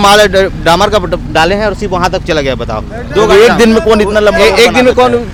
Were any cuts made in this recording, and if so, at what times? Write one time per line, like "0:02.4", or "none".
none